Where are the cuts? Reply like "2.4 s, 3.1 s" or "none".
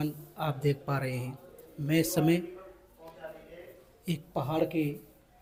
none